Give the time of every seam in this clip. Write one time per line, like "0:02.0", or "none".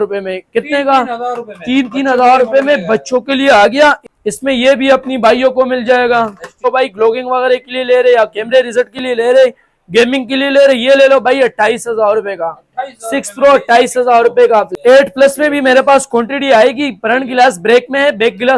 0:04.1
0:06.6
0:14.7